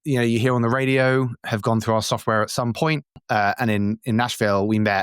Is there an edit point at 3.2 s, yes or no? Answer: yes